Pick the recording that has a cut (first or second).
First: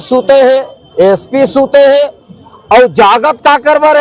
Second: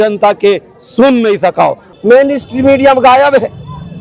second